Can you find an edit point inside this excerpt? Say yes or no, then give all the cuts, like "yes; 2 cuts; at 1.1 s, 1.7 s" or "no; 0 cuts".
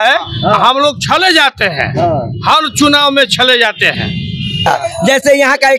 no; 0 cuts